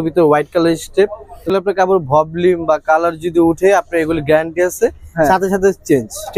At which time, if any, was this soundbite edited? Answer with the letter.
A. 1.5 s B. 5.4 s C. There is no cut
A